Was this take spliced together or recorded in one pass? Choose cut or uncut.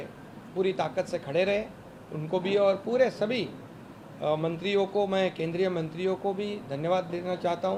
uncut